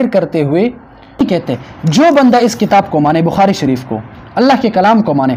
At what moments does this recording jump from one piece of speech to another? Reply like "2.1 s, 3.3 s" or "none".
1.2 s